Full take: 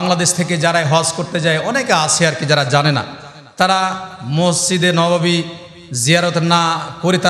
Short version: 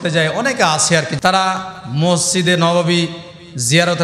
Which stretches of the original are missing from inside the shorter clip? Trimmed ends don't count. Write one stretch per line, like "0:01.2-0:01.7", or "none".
0:02.4-0:03.5